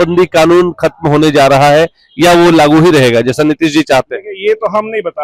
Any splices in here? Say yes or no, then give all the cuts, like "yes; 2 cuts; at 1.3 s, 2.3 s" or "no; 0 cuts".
no; 0 cuts